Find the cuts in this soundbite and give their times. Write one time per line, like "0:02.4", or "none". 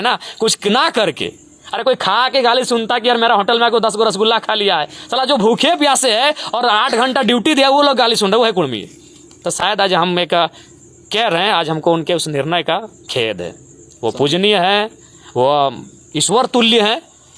none